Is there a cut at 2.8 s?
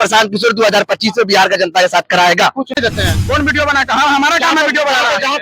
yes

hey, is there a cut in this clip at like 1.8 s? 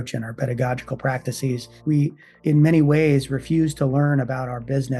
yes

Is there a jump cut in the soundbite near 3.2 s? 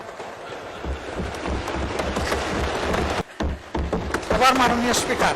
yes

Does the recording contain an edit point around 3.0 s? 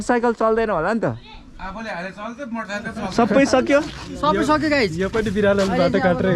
yes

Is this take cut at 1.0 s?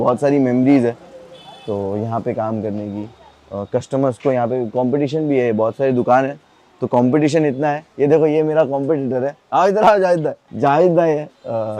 no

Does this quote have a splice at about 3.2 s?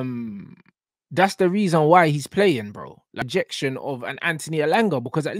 yes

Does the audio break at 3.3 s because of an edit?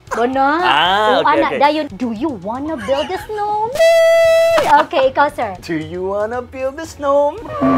no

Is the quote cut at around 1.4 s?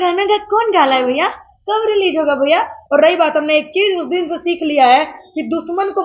no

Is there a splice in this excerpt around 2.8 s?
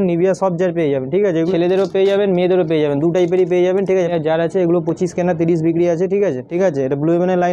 no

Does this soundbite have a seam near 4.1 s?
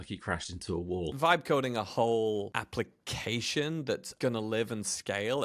yes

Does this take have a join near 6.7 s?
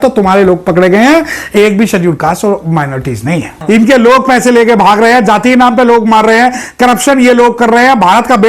no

